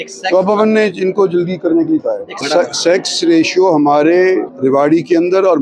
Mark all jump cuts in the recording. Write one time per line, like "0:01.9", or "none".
0:02.3
0:04.5